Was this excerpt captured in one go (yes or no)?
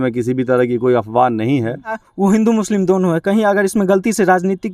no